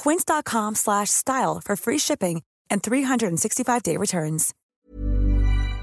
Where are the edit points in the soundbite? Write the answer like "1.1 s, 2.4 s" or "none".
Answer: 4.5 s